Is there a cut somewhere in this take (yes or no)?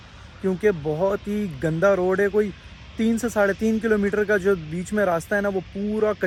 no